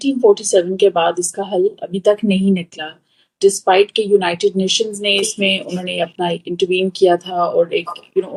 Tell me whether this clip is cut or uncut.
uncut